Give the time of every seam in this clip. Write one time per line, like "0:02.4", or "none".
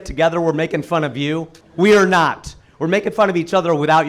0:01.6